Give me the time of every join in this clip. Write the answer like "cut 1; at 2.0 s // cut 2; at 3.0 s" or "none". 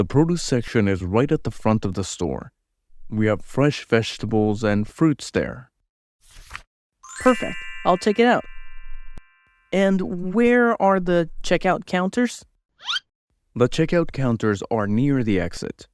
cut 1; at 6.8 s